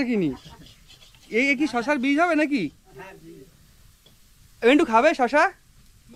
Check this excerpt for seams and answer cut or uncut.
uncut